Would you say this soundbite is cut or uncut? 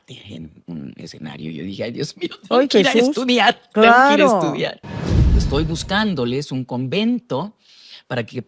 cut